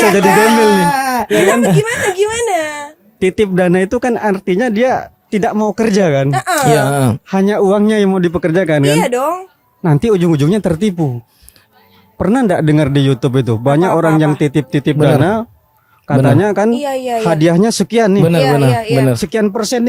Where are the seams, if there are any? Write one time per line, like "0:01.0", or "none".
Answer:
none